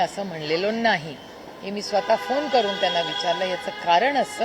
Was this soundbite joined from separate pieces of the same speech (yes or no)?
no